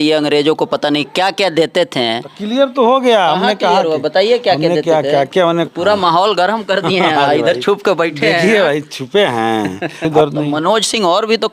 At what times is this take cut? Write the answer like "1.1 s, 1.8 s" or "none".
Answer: 5.6 s, 10.1 s